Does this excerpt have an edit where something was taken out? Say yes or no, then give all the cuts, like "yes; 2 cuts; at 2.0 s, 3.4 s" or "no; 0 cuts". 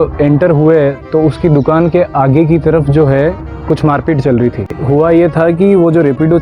yes; 1 cut; at 4.8 s